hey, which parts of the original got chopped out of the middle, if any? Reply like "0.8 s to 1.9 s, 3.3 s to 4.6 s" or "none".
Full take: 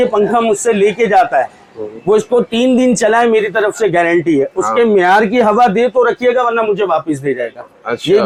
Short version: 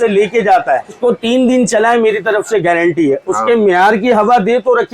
1.6 s to 2.3 s